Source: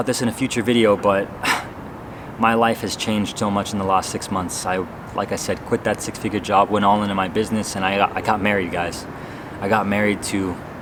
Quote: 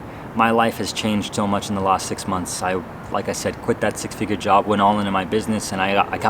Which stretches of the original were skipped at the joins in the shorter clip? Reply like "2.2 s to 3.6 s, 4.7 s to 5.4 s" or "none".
none